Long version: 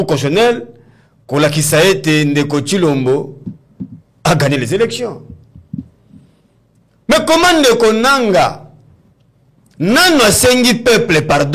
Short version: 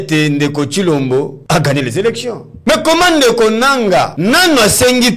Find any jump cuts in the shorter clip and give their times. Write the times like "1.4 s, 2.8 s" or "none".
1.4 s, 2.5 s, 4.1 s

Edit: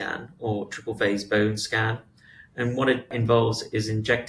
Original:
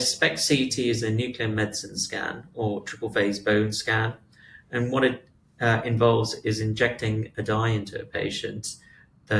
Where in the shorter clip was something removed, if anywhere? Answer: 3.1 s

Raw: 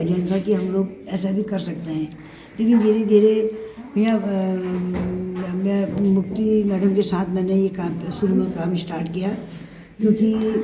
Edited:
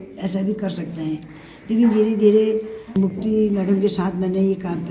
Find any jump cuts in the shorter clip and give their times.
3.0 s

